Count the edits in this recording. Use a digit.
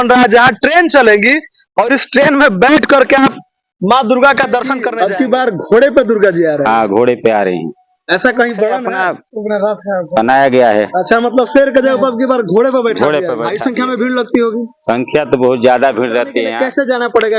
4